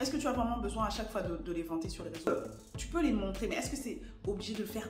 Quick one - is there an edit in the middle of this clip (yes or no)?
yes